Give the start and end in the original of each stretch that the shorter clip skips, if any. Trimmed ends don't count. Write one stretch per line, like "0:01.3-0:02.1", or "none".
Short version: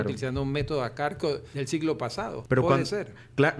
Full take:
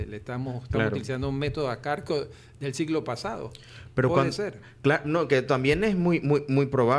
0:02.3-0:02.5
0:03.4-0:03.8